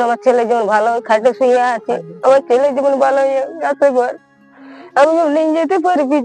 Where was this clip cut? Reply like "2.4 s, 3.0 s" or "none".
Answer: none